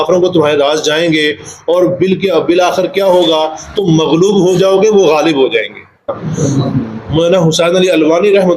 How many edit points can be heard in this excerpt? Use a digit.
1